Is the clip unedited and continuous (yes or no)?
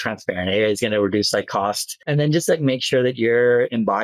no